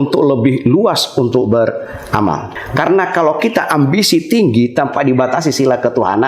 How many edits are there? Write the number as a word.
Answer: one